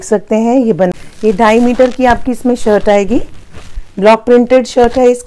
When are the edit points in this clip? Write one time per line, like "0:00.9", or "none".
0:00.9